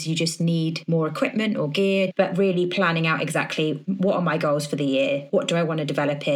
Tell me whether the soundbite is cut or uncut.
cut